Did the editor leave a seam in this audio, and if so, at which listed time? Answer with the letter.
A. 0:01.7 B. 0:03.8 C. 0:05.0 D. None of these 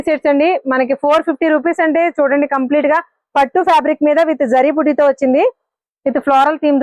D